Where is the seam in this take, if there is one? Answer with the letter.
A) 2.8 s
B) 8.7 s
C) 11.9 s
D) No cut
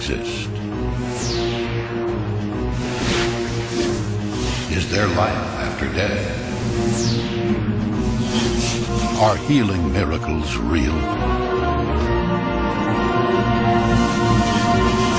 C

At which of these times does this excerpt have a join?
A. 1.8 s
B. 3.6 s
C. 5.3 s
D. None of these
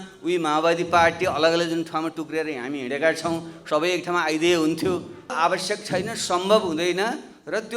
C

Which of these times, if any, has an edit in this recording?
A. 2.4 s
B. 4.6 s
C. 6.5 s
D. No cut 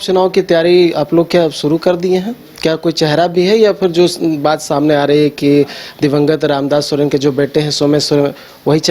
D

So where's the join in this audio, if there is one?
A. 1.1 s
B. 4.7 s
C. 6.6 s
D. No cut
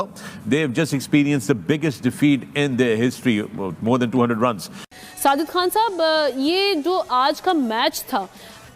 B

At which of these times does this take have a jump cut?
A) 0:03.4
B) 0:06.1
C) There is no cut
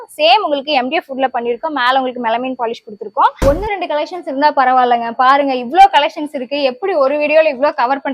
A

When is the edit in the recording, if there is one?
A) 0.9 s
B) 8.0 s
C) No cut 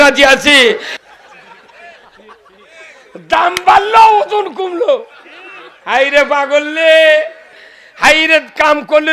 A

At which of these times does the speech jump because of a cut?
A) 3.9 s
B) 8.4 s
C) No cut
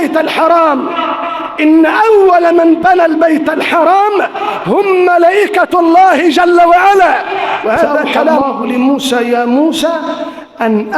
B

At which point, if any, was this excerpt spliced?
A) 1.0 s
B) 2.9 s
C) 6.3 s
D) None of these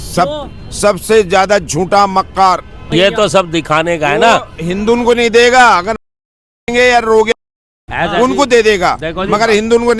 B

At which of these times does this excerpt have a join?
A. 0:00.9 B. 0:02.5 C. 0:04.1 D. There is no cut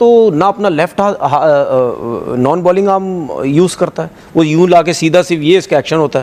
D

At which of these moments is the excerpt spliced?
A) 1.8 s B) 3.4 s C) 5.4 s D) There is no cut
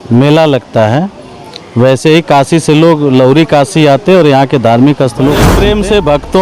C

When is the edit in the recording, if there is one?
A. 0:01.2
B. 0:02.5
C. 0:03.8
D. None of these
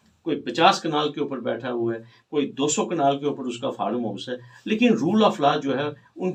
D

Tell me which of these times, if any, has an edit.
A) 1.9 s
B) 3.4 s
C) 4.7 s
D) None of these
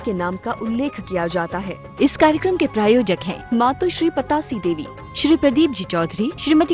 A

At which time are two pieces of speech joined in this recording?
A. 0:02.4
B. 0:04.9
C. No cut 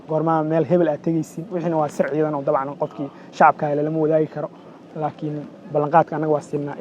C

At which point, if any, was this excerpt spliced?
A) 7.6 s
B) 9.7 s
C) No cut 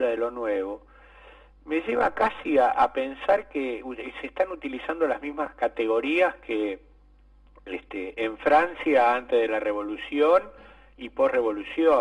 B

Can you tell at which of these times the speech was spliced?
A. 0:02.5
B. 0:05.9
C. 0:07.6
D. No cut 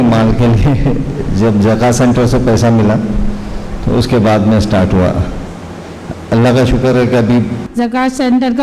C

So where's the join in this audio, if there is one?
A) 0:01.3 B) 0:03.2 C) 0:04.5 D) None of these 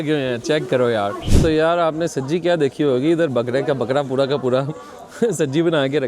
A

